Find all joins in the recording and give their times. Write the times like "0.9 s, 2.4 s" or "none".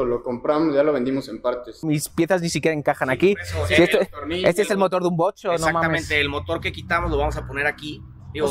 1.8 s